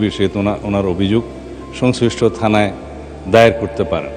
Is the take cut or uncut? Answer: uncut